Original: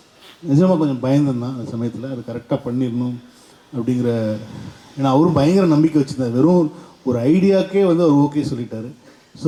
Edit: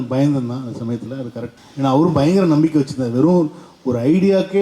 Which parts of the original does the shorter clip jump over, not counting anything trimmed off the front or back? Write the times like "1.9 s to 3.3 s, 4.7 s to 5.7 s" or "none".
2.3 s to 4.6 s